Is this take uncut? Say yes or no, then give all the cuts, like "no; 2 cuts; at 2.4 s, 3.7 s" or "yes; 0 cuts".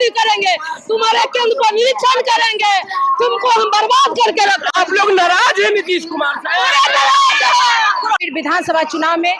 no; 1 cut; at 8.3 s